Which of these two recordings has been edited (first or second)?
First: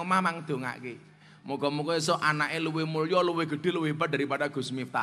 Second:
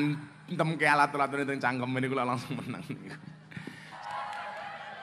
second